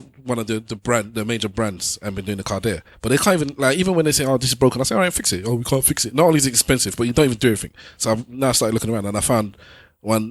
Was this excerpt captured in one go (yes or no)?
yes